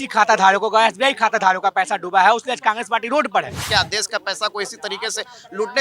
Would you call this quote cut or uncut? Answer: cut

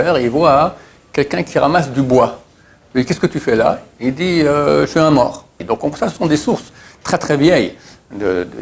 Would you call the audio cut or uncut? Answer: cut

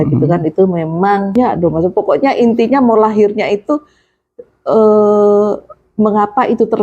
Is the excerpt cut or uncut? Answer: cut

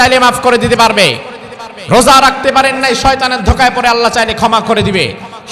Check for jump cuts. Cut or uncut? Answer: uncut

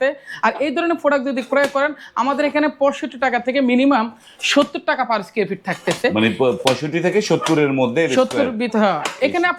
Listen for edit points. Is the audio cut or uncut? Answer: uncut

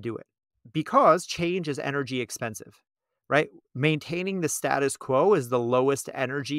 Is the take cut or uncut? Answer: uncut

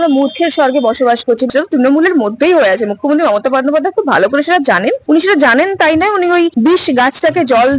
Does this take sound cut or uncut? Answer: cut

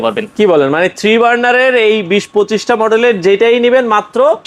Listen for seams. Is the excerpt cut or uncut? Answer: uncut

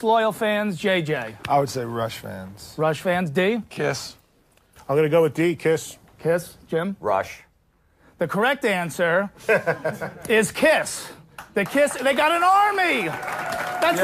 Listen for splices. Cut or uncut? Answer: uncut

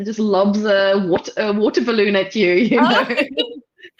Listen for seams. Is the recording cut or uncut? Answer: uncut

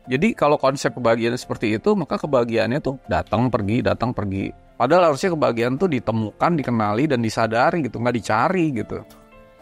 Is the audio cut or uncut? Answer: cut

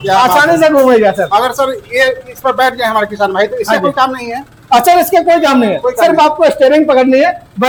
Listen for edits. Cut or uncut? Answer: uncut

